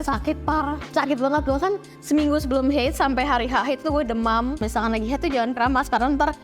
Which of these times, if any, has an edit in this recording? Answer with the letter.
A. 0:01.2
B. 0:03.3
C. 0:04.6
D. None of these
C